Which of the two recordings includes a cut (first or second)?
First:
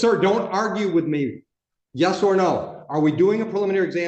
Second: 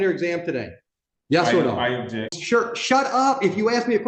second